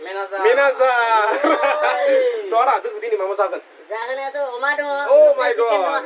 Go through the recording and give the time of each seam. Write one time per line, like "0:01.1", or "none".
none